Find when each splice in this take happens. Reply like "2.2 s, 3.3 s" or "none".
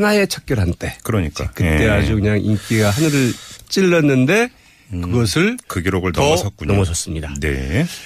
4.3 s